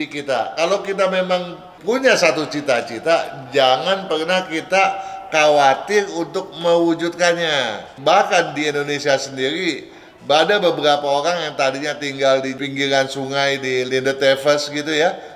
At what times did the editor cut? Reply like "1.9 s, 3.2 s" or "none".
1.7 s, 7.8 s

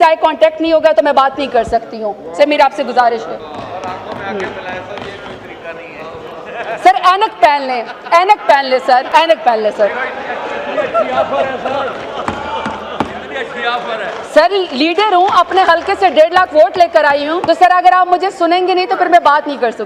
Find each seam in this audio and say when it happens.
3.4 s, 9.1 s, 17.3 s

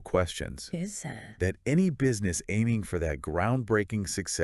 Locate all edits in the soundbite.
none

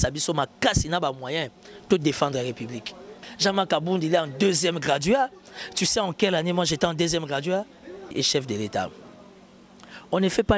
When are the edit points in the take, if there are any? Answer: 3.1 s, 8.1 s

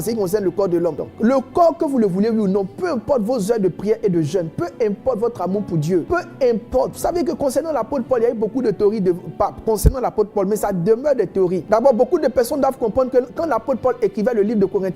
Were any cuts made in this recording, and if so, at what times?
1.1 s, 6.1 s, 11.6 s

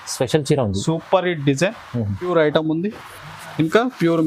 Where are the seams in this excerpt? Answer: 2.3 s

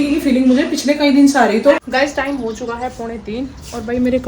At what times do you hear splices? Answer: 1.8 s

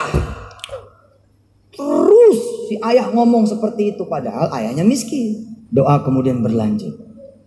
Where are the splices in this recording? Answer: 5.5 s

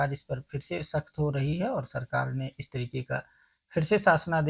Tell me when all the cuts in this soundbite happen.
none

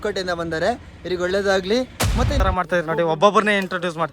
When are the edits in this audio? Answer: 2.3 s

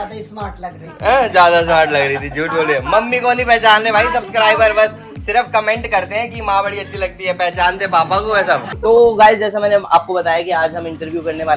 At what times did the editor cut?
8.7 s

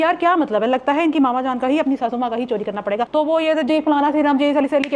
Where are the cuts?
3.1 s

